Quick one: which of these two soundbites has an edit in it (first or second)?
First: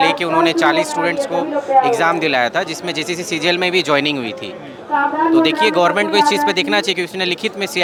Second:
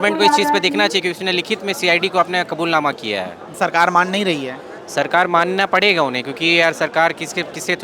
second